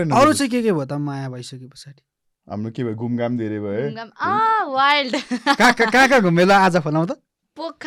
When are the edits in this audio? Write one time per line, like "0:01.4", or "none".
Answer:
none